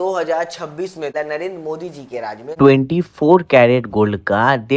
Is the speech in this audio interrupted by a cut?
yes; 1 cut; at 1.1 s

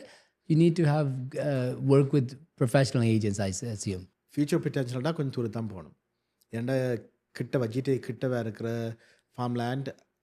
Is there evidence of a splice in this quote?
yes; 1 cut; at 4.1 s

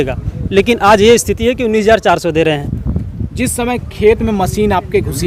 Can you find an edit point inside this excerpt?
no; 0 cuts

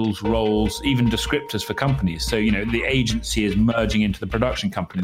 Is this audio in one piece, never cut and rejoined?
yes; 0 cuts

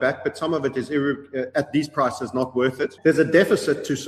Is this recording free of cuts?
no; 1 cut; at 2.9 s

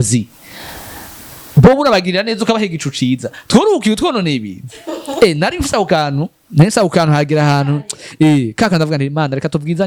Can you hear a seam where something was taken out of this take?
no; 0 cuts

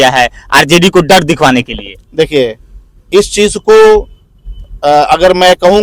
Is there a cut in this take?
no; 0 cuts

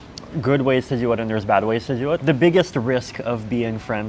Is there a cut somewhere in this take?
yes; 1 cut; at 2.2 s

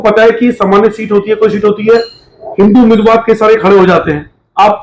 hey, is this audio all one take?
yes; 0 cuts

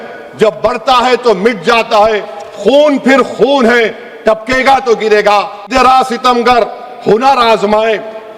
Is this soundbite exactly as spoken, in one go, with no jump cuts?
no; 1 cut; at 5.7 s

